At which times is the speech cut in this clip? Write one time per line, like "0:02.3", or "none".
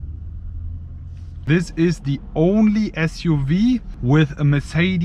0:01.4
0:03.9